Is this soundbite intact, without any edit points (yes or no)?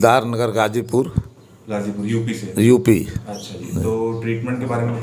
yes